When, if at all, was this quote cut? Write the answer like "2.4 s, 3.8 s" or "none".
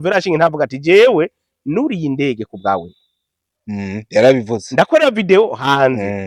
none